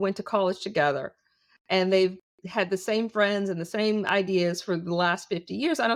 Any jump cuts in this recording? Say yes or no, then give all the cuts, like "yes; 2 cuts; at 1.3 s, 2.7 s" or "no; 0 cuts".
no; 0 cuts